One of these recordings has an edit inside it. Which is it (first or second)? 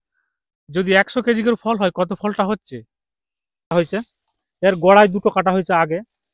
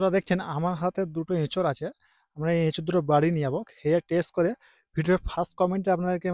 first